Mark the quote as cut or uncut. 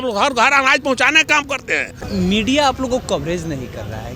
cut